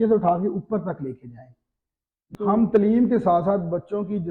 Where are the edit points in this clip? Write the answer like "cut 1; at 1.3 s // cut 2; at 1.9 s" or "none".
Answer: cut 1; at 2.3 s